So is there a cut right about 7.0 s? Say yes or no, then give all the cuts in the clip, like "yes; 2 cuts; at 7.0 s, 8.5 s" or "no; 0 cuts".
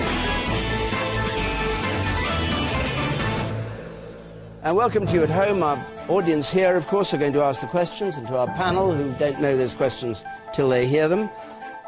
no; 0 cuts